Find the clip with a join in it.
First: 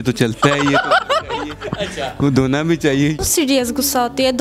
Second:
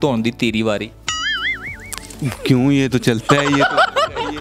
first; 1 cut; at 3.2 s

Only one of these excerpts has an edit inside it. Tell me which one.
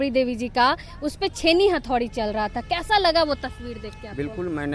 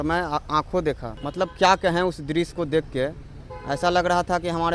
second; 1 cut; at 1.1 s

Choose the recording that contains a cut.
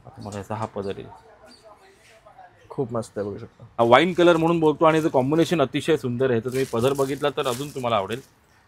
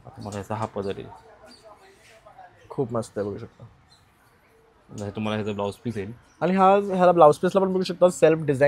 first; 1 cut; at 3.6 s

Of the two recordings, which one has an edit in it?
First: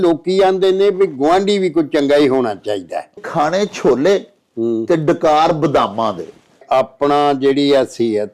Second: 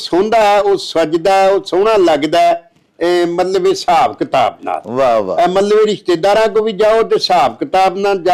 first; 2 cuts; at 3.2 s, 6.6 s

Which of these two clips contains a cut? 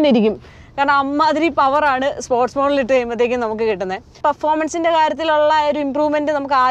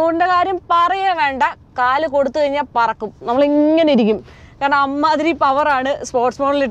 first; 1 cut; at 4.2 s

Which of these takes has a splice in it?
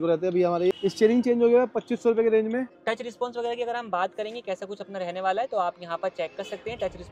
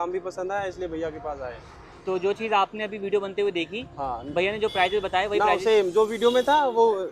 first; 2 cuts; at 0.7 s, 2.7 s

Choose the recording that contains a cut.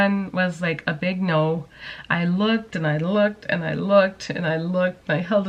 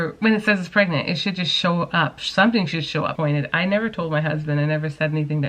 second; 1 cut; at 3.1 s

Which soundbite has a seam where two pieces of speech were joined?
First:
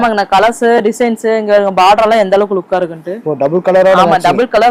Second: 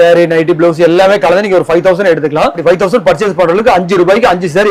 second; 1 cut; at 2.6 s

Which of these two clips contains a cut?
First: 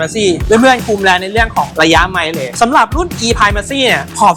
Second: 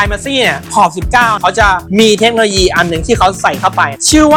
first; 1 cut; at 2.5 s

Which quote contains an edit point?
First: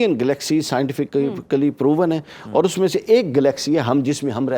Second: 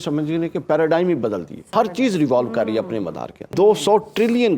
second; 2 cuts; at 1.5 s, 3.4 s

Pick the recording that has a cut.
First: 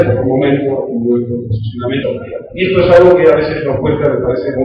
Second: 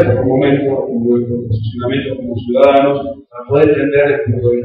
second; 1 cut; at 2.1 s

